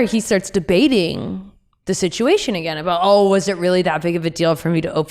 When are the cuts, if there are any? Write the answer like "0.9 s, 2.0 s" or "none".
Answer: none